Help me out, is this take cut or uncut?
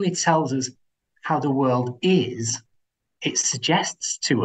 uncut